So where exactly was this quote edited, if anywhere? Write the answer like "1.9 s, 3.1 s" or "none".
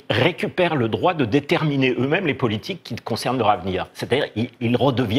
none